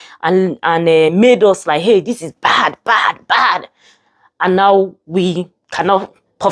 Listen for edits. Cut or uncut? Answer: uncut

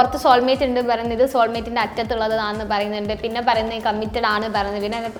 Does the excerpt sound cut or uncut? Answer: uncut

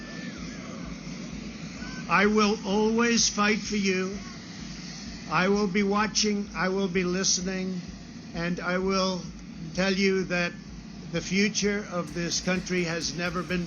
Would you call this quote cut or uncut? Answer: cut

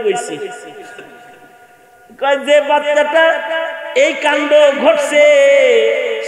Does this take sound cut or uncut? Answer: uncut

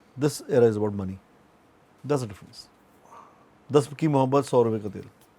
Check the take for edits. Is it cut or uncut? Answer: uncut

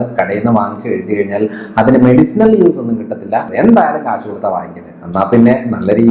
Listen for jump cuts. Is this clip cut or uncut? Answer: cut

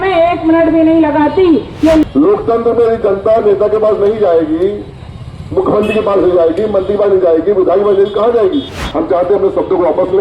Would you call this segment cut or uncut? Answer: cut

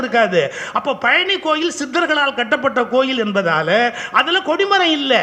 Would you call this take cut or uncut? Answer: uncut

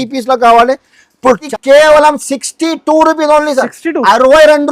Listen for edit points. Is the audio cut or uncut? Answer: cut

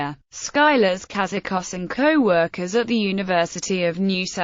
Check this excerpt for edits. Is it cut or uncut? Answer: uncut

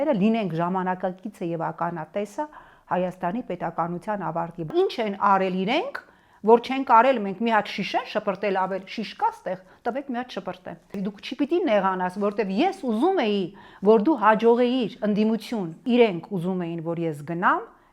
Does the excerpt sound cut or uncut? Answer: cut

